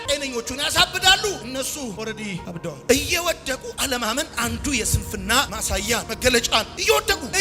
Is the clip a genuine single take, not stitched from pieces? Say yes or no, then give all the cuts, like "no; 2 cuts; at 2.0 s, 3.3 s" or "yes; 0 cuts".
yes; 0 cuts